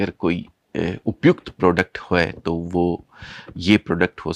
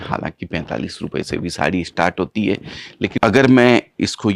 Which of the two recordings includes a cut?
second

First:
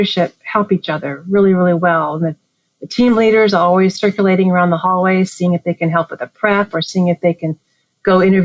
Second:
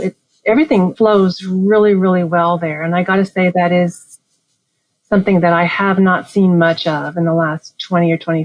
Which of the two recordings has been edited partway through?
second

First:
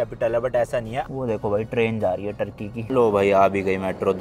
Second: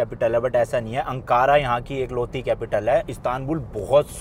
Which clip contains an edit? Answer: first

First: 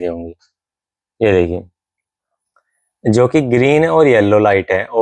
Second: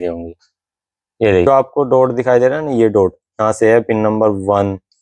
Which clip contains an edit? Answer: second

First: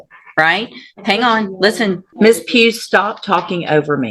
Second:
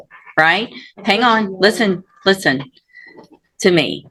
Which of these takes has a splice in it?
first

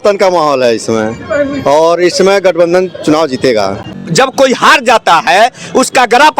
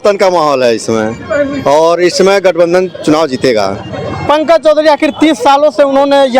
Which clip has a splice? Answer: first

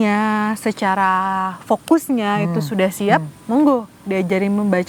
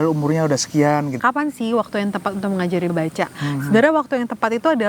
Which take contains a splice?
second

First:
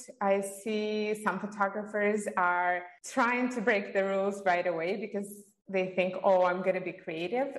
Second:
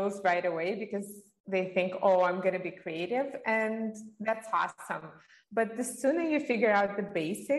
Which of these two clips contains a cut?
first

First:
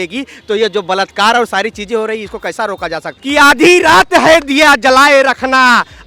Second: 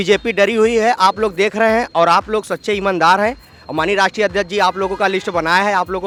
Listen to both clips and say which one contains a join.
first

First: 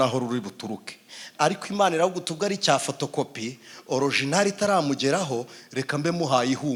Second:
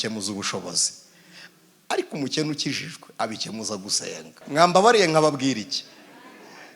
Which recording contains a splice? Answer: second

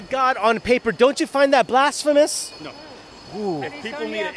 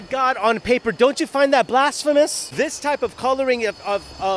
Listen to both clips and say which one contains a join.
second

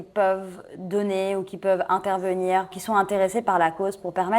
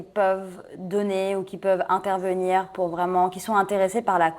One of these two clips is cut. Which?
first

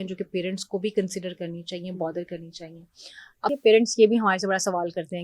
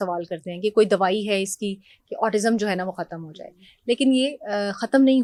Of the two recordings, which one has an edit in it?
first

